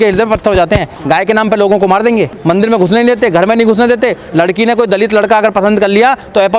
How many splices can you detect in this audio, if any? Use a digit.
1